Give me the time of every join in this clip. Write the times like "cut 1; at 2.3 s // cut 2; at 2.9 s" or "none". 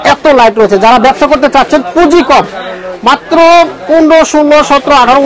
none